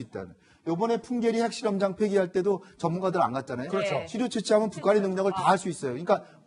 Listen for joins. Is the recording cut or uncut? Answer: cut